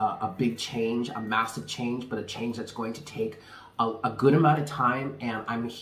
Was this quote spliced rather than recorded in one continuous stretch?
no; 0 cuts

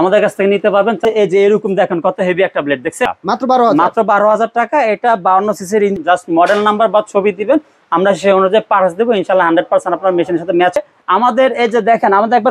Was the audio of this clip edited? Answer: yes; 4 cuts; at 1.0 s, 3.1 s, 6.0 s, 10.8 s

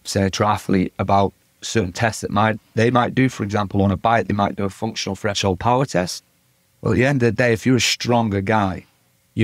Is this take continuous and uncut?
yes; 0 cuts

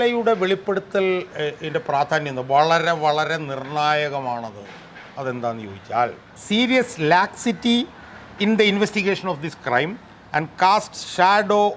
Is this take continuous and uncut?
no; 2 cuts; at 1.3 s, 6.3 s

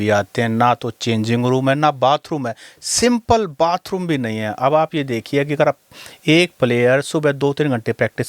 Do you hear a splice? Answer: no; 0 cuts

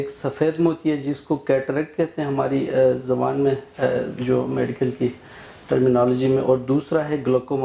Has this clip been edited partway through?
no; 0 cuts

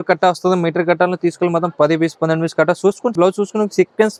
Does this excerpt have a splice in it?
no; 0 cuts

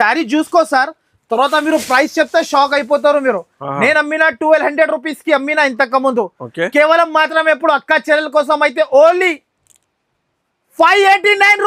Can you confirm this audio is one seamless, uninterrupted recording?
yes; 0 cuts

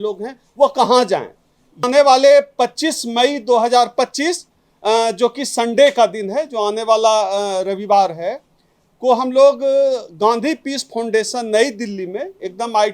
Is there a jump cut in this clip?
yes; 1 cut; at 1.8 s

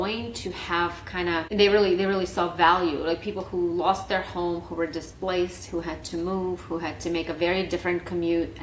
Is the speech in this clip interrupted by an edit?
yes; 1 cut; at 1.5 s

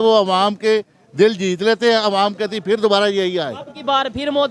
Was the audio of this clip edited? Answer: no; 0 cuts

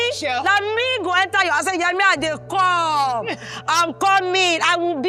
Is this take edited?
no; 0 cuts

